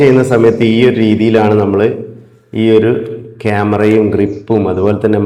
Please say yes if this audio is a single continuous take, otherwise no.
yes